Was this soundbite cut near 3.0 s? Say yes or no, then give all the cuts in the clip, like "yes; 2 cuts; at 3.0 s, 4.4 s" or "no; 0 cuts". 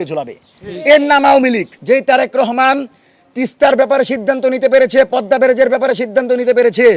no; 1 cut; at 1.7 s